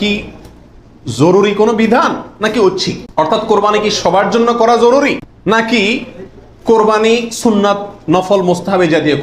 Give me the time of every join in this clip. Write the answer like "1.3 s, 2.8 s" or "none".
3.0 s, 5.5 s